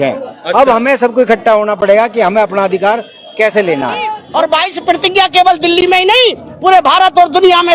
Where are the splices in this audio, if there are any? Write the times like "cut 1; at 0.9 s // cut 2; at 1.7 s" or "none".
cut 1; at 4.2 s